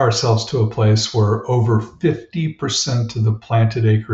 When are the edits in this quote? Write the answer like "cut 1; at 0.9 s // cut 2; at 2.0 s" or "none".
none